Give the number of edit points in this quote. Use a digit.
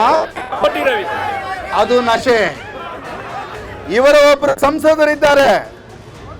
0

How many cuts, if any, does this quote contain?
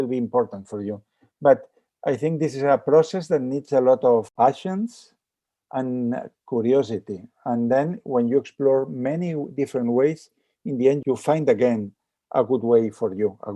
2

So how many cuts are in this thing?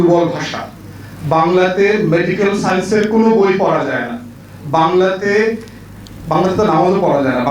0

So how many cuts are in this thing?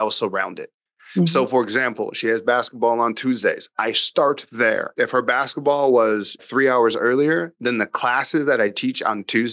2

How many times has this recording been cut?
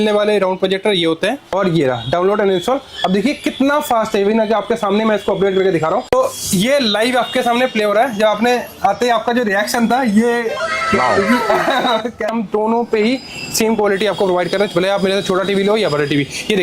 3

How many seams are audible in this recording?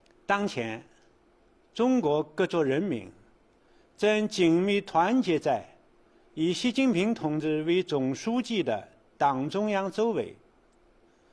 1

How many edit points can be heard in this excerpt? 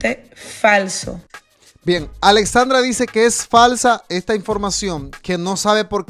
0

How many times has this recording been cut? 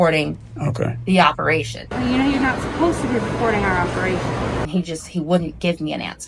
2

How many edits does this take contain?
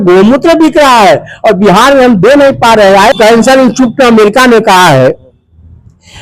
1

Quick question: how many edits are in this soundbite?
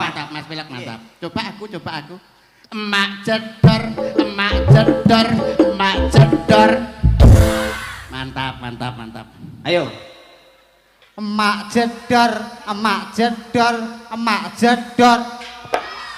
0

